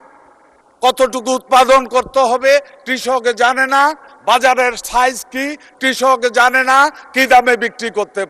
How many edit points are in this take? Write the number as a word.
zero